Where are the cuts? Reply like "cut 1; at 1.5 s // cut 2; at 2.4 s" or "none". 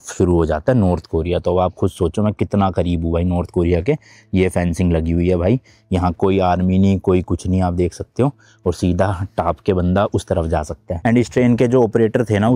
cut 1; at 11.0 s